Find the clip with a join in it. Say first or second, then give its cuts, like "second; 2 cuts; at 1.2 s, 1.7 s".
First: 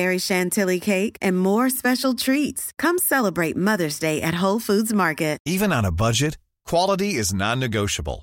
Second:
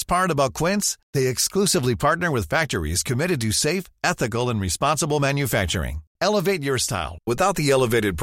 first; 1 cut; at 5.4 s